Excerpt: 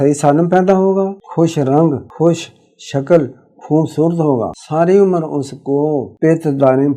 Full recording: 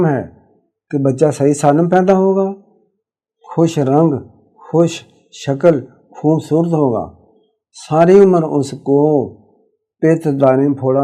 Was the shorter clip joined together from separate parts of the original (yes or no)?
yes